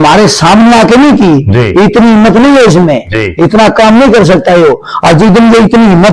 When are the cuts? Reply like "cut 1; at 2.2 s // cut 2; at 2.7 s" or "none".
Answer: none